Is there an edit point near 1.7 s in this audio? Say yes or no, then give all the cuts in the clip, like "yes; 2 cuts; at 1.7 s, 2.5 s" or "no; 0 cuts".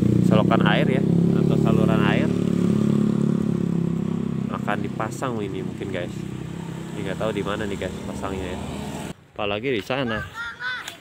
no; 1 cut; at 9.1 s